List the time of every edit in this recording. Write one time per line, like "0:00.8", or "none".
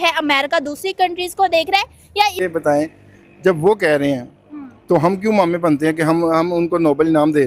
none